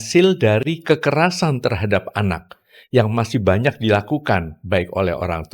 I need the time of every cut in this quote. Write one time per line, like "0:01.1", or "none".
none